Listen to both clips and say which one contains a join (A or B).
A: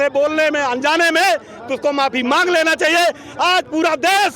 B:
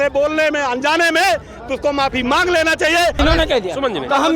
B